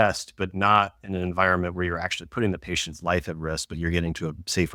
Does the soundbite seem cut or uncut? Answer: uncut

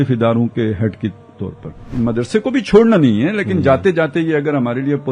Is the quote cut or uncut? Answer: cut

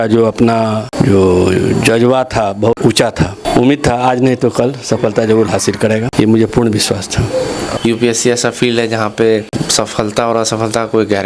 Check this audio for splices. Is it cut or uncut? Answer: cut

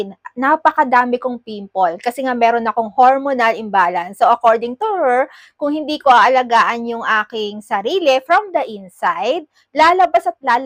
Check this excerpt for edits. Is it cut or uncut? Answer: uncut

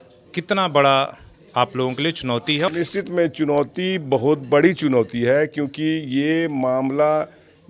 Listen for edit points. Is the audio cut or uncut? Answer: cut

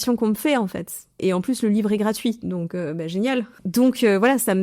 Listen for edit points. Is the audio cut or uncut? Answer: cut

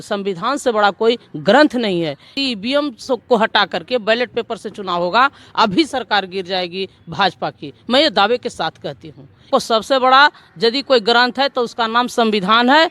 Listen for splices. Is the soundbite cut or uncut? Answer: cut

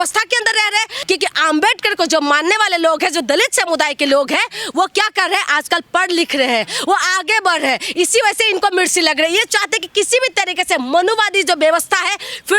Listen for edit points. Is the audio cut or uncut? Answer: cut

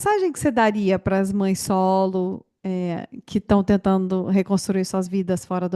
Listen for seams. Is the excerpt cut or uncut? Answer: uncut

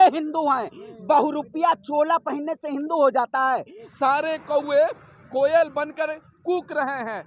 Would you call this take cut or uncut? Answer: cut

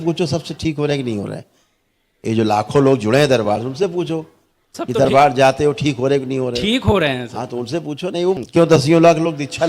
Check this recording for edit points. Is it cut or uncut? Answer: cut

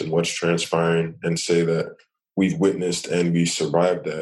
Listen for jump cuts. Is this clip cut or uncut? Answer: uncut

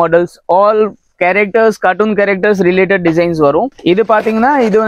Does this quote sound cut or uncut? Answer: uncut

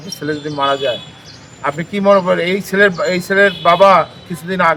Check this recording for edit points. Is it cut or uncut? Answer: uncut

